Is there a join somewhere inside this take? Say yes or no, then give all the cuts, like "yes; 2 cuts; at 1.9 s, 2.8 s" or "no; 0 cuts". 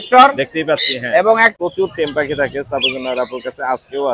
yes; 1 cut; at 1.5 s